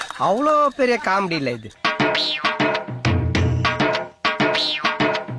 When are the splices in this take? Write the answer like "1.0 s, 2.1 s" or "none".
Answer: none